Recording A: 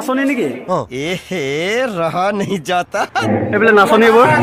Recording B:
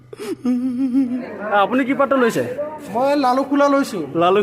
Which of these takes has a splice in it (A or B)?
B